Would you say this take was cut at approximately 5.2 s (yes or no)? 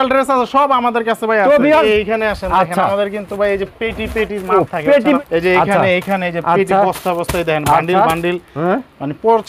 yes